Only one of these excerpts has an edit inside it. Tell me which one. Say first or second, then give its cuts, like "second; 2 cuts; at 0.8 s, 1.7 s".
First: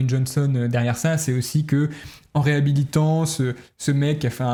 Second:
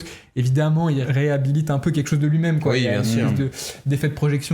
second; 1 cut; at 1.1 s